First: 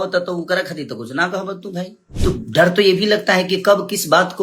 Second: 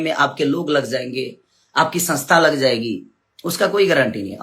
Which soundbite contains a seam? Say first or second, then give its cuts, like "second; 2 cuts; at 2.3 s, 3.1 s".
first; 1 cut; at 2.0 s